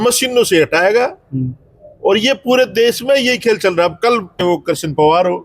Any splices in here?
yes; 1 cut; at 4.4 s

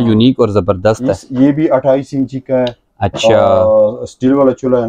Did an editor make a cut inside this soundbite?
no; 0 cuts

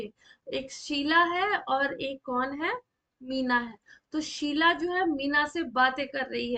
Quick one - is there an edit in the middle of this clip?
no; 0 cuts

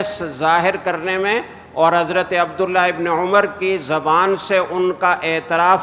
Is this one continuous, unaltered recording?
yes; 0 cuts

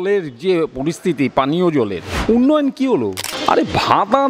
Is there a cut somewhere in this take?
yes; 2 cuts; at 2.1 s, 3.3 s

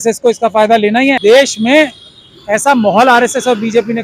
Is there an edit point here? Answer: yes; 1 cut; at 1.2 s

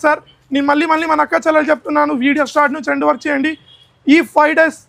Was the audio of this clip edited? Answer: no; 0 cuts

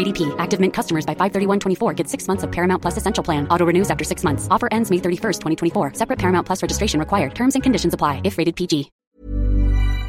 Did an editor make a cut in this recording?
yes; 1 cut; at 9.0 s

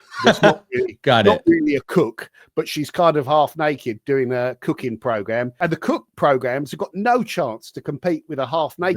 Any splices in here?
yes; 1 cut; at 5.5 s

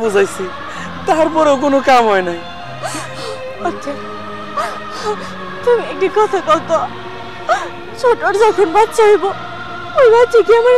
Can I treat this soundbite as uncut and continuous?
yes; 0 cuts

